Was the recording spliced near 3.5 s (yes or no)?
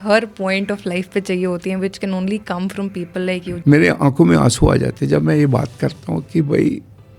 yes